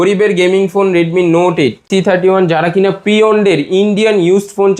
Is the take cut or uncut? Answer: cut